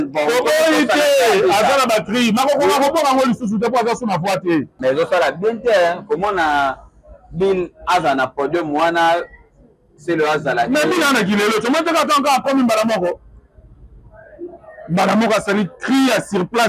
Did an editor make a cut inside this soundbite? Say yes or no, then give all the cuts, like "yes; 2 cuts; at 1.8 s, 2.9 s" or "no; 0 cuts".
yes; 1 cut; at 4.7 s